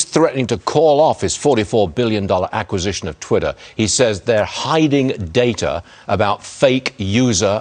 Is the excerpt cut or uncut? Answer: uncut